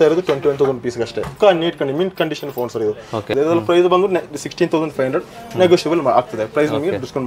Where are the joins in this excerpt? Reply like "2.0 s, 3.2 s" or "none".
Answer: 1.3 s, 3.3 s